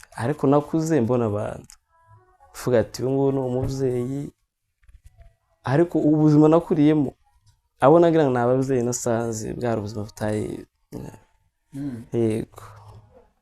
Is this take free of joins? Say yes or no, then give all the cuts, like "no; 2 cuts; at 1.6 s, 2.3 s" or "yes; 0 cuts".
yes; 0 cuts